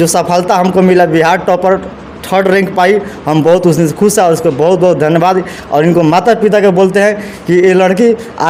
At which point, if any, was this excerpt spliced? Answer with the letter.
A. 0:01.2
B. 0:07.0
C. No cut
C